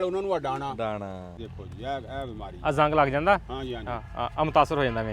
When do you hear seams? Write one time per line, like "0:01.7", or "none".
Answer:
0:01.4